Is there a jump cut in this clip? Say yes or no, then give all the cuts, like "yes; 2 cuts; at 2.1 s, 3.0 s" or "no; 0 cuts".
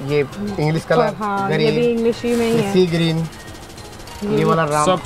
no; 0 cuts